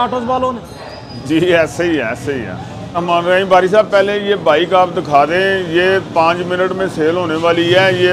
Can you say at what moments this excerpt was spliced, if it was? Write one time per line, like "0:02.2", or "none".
none